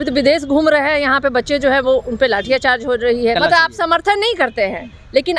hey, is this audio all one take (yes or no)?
no